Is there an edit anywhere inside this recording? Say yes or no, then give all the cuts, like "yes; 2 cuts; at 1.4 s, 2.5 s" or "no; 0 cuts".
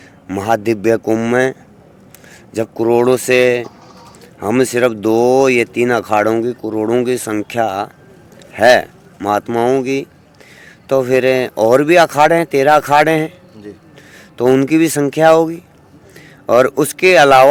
no; 0 cuts